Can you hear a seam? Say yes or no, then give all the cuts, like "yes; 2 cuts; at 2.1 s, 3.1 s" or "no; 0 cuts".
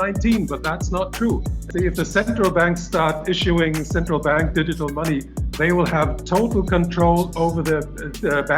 yes; 1 cut; at 1.6 s